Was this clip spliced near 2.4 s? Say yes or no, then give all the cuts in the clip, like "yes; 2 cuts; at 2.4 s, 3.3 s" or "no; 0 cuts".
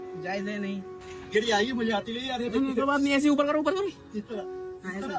no; 1 cut; at 1.1 s